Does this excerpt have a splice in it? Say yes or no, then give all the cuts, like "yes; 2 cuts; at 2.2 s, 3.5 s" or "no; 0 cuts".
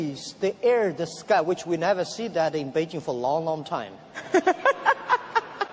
yes; 1 cut; at 3.6 s